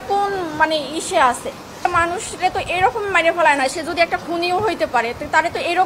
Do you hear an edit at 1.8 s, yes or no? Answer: yes